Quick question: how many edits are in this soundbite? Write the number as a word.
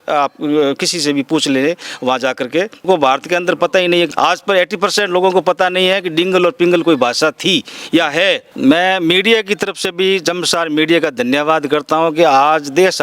three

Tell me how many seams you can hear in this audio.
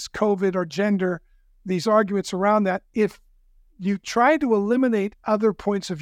zero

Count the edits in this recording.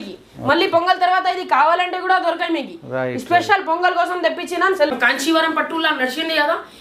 one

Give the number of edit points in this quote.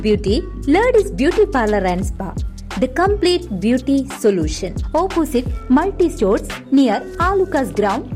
zero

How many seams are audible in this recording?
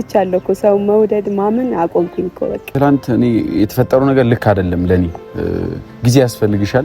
one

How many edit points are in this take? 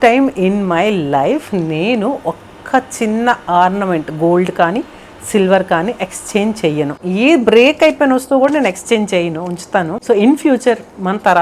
one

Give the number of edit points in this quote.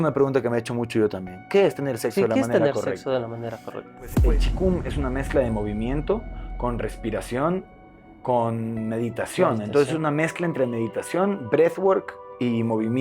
one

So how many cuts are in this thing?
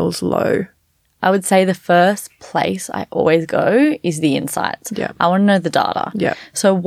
one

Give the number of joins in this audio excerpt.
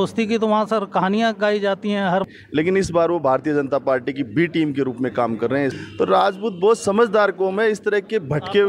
two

